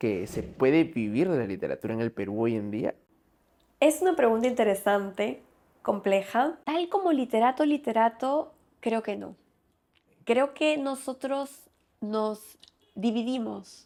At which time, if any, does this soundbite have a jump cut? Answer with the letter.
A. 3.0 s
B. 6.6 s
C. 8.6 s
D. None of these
D